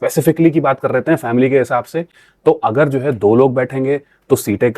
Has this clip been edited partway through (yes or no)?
no